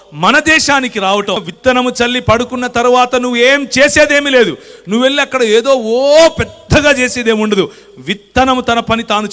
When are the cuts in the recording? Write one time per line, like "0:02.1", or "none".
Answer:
0:01.5